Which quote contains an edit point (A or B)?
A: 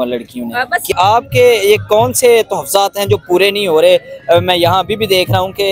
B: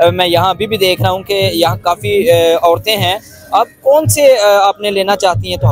A